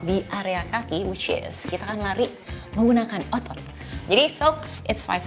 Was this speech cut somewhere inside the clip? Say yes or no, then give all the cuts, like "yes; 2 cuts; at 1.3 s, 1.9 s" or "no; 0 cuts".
yes; 1 cut; at 3.6 s